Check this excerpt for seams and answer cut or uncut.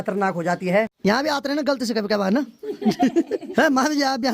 cut